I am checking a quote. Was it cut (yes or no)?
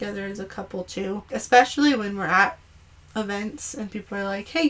yes